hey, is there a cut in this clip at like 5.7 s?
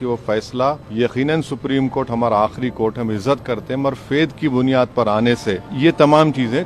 yes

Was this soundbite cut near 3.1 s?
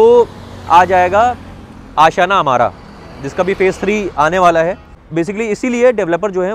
no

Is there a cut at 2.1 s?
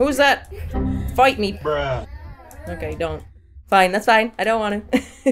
no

